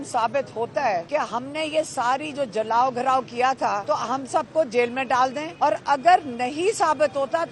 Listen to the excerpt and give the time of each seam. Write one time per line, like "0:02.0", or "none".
0:01.1
0:03.8
0:05.4